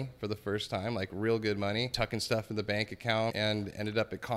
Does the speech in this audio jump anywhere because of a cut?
yes; 2 cuts; at 1.9 s, 3.3 s

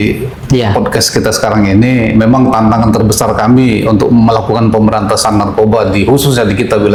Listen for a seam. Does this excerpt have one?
no; 0 cuts

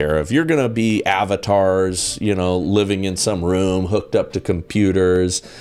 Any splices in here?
no; 0 cuts

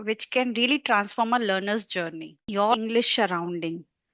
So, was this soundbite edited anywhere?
yes; 1 cut; at 2.7 s

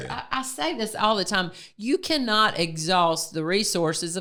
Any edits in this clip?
no; 0 cuts

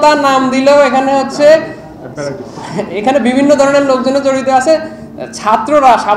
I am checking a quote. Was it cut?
no; 0 cuts

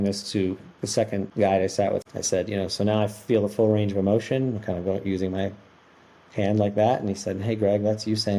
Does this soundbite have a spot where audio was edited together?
yes; 2 cuts; at 1.3 s, 2.0 s

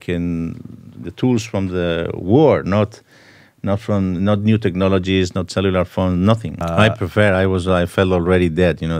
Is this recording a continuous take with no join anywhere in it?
no; 1 cut; at 6.6 s

